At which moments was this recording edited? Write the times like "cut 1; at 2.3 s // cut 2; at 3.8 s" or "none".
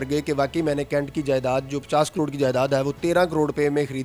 none